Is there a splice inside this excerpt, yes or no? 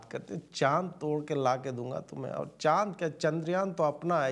no